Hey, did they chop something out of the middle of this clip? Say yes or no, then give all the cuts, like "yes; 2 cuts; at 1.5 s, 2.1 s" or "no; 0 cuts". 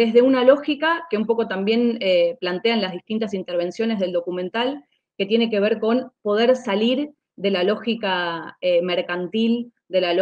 no; 0 cuts